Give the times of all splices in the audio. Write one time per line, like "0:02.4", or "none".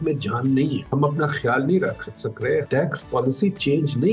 0:00.8
0:02.7